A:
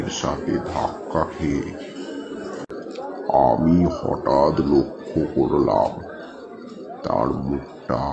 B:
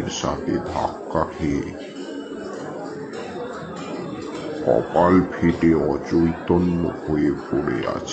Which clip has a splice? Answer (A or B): A